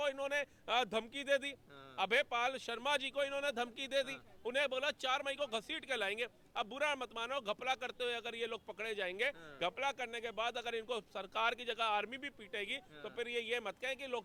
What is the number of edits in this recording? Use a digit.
0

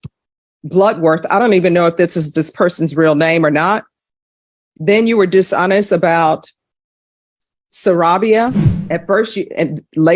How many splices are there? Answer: 0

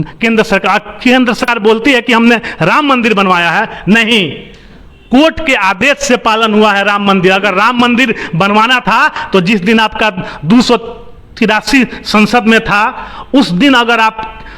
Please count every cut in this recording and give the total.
1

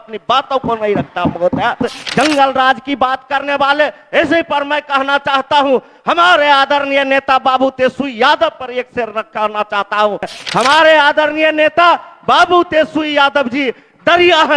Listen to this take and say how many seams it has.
2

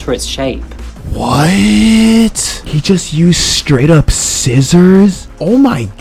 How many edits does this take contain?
0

